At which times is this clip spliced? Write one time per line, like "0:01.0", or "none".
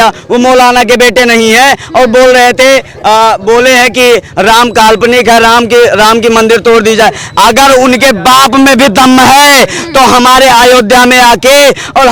none